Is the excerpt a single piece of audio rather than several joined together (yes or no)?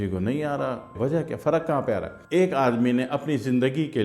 no